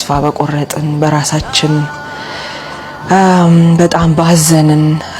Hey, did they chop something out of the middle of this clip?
no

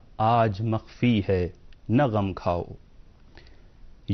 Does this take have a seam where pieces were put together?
no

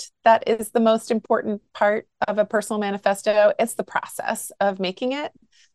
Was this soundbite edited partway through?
no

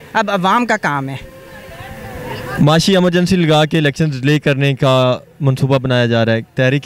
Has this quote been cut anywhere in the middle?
no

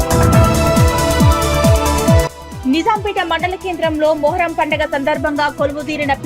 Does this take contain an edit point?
yes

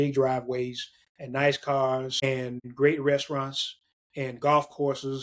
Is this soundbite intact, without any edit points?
no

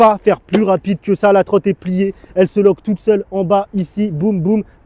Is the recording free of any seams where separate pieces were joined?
yes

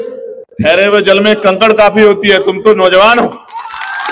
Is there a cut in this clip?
no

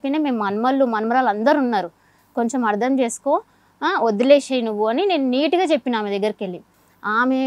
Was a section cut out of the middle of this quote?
no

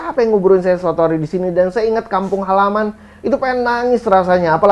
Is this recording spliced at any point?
no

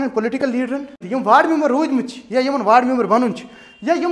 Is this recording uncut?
no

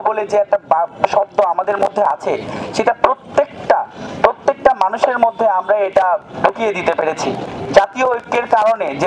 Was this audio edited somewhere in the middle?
no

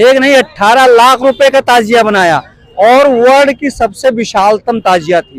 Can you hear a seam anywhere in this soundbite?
no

